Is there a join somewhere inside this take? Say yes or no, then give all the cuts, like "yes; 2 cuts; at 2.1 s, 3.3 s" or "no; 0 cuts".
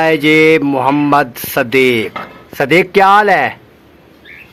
no; 0 cuts